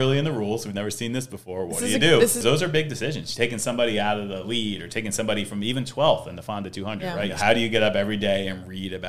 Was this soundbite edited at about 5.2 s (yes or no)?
no